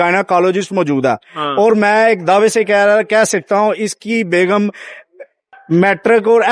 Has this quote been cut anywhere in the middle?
no; 0 cuts

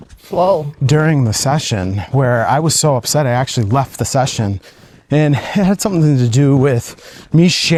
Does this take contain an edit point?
no; 0 cuts

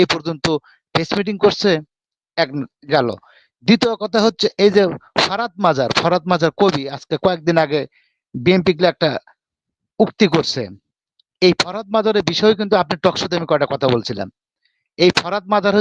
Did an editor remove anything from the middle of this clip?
no; 0 cuts

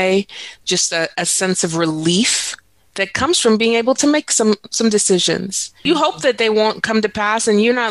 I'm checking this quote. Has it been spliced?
yes; 1 cut; at 5.8 s

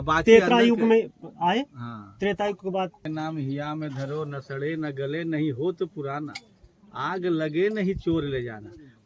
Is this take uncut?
no; 1 cut; at 3.0 s

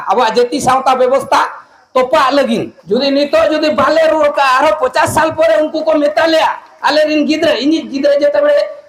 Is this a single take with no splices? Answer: no; 1 cut; at 2.7 s

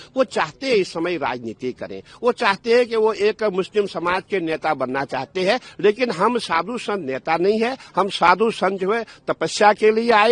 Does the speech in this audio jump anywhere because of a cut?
no; 0 cuts

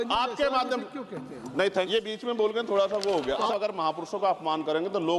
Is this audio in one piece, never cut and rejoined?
no; 2 cuts; at 1.9 s, 3.5 s

